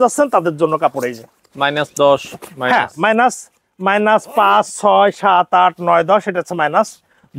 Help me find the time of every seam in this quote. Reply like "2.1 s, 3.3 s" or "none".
none

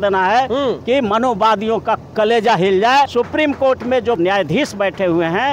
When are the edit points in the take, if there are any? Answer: 3.1 s, 4.2 s

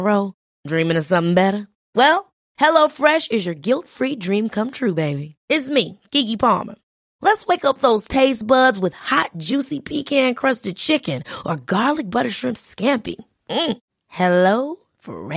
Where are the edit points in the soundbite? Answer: none

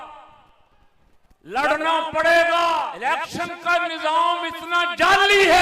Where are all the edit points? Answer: 2.9 s

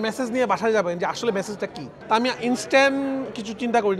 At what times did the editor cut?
1.9 s

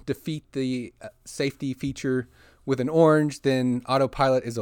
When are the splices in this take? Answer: none

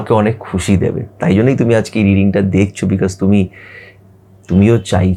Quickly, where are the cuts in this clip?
none

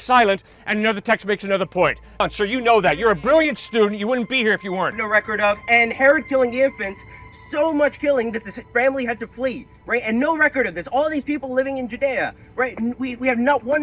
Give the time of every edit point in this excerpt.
2.2 s, 5.0 s

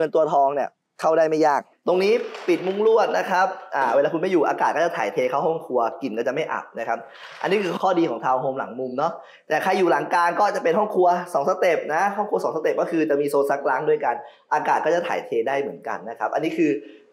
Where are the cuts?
1.7 s

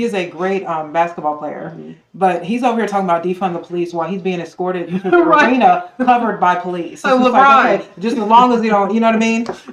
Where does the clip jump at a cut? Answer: none

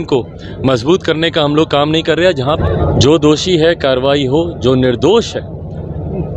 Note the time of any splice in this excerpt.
2.6 s

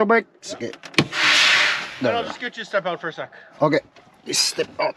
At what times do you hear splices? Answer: none

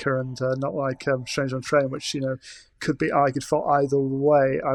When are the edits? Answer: none

